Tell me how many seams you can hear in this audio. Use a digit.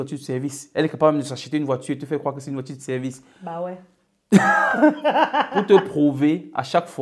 0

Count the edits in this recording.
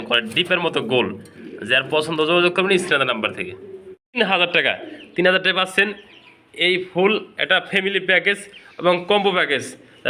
1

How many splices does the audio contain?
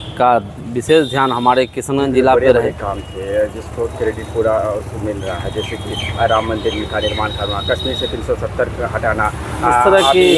1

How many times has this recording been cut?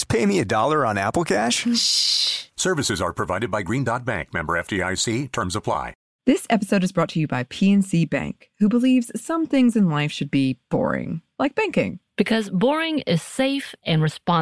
1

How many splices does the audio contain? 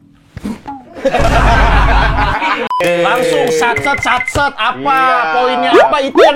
1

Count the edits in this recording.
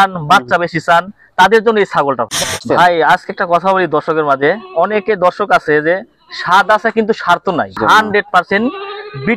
2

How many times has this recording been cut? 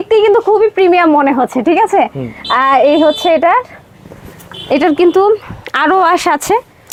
0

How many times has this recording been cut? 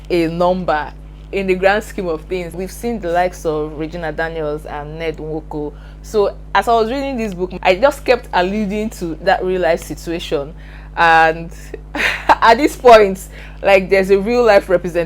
1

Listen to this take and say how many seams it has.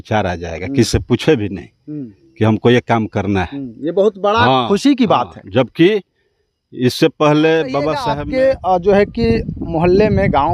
1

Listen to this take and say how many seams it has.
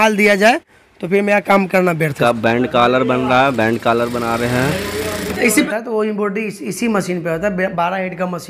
2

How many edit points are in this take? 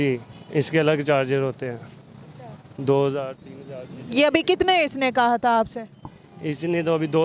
0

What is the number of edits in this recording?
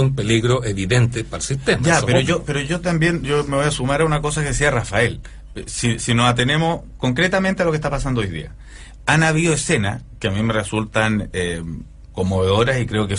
0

